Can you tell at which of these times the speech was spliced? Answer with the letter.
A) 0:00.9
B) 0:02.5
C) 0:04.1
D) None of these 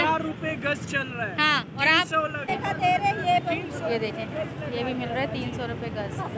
B